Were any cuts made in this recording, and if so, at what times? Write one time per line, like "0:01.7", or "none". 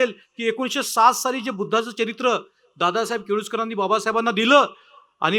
none